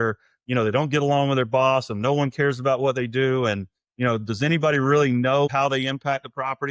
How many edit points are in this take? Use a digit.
1